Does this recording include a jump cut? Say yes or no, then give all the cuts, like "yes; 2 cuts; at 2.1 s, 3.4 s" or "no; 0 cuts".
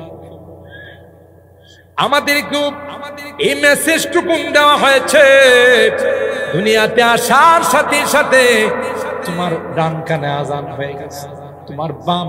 no; 0 cuts